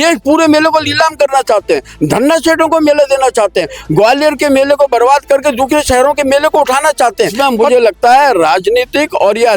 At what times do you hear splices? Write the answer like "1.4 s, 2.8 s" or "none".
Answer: 7.3 s